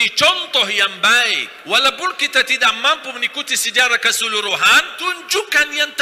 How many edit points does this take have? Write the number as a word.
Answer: two